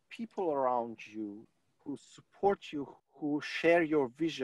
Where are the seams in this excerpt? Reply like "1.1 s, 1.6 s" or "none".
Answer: 1.5 s, 2.9 s